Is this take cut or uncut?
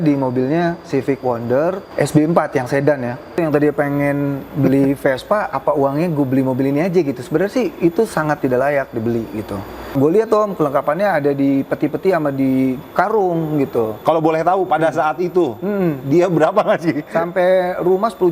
cut